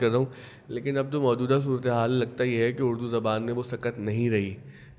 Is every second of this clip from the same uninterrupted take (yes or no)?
yes